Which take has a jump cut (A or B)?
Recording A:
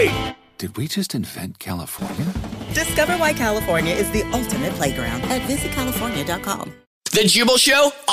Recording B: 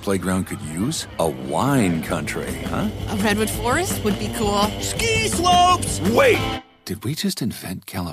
A